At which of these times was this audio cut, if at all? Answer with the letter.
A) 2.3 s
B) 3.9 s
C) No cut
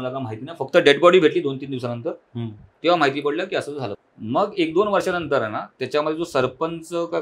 B